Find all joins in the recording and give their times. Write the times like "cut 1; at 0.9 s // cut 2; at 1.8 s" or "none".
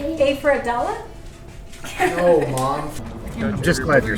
cut 1; at 2.9 s